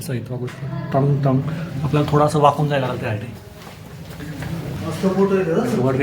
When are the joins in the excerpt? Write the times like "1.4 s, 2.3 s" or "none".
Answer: 4.7 s